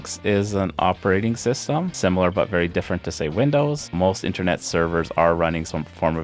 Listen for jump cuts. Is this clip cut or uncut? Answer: cut